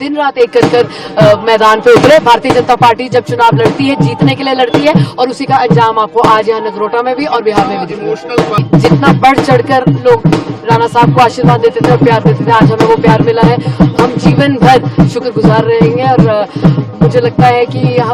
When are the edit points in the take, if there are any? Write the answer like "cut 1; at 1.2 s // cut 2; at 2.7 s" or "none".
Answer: cut 1; at 8.6 s